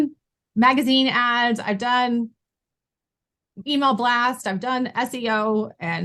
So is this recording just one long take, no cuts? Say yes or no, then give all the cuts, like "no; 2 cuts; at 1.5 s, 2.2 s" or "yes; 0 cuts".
yes; 0 cuts